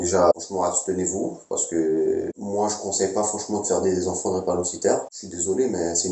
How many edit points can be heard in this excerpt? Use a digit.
1